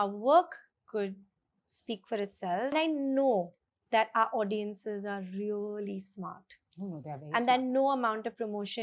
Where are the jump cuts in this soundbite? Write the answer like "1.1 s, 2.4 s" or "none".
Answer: 2.7 s